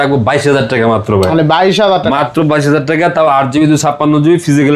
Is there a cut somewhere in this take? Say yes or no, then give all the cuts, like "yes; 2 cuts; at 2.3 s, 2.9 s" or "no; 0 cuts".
no; 0 cuts